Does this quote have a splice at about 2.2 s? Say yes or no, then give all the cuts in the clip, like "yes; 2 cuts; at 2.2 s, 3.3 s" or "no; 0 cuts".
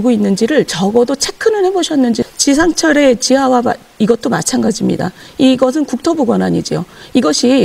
yes; 1 cut; at 2.2 s